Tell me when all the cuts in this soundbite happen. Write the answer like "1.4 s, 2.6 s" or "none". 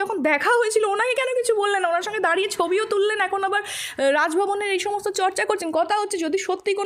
none